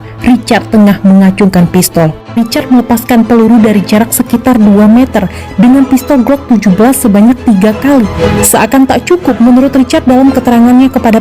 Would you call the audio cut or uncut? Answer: cut